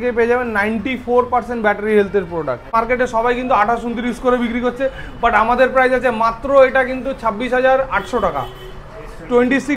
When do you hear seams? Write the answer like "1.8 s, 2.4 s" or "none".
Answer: 2.7 s